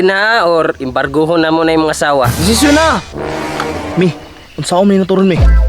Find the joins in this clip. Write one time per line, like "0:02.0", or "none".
0:02.3